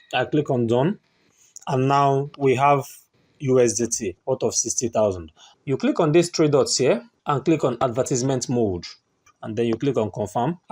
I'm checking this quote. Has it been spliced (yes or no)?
yes